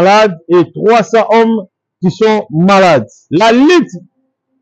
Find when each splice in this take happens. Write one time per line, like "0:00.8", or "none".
0:03.2